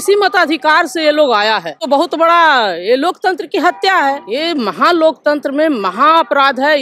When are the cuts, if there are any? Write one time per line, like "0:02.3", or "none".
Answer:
0:01.8
0:04.2